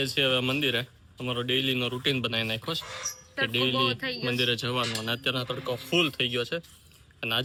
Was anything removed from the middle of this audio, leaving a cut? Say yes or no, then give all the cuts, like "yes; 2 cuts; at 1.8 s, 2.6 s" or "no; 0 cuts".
no; 0 cuts